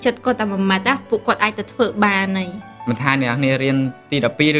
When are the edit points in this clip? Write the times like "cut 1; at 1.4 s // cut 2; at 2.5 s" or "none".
cut 1; at 2.8 s